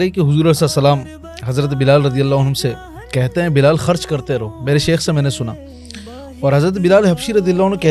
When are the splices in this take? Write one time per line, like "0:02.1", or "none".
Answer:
none